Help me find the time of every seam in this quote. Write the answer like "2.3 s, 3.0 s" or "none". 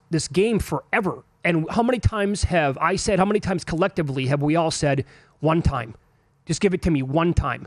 none